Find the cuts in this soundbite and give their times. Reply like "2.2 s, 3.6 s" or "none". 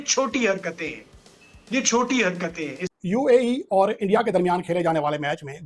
2.8 s